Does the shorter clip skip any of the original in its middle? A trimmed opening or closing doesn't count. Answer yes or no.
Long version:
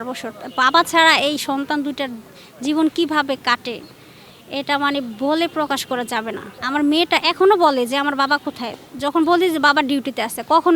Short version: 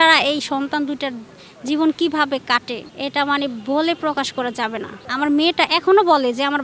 yes